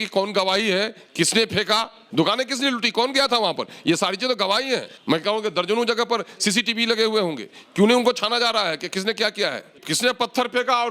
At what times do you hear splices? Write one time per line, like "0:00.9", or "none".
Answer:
0:02.0
0:04.9
0:09.8